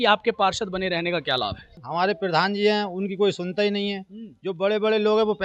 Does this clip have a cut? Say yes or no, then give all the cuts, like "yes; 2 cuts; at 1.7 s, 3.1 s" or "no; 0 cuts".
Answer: yes; 1 cut; at 1.7 s